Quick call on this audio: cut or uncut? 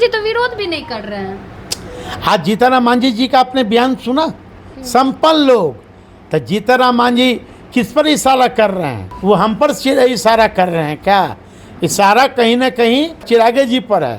cut